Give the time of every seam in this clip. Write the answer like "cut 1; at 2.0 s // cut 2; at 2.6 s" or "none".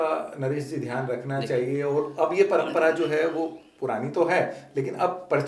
none